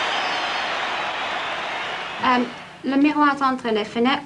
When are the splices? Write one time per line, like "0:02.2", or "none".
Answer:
0:01.0